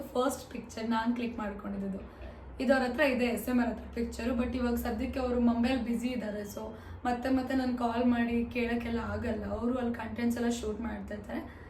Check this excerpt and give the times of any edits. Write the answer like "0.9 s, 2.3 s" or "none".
none